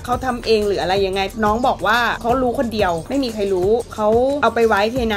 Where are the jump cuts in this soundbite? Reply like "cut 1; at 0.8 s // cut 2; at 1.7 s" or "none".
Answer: cut 1; at 1.3 s // cut 2; at 2.2 s // cut 3; at 3.0 s // cut 4; at 4.3 s